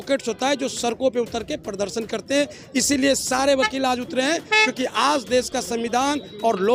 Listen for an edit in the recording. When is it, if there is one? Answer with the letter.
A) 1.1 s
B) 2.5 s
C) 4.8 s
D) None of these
D